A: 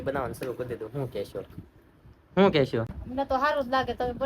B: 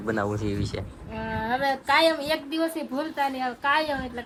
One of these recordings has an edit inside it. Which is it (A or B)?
A